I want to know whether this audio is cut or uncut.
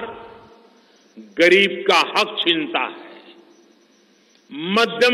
uncut